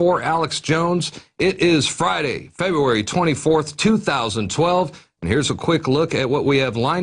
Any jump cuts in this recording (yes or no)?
yes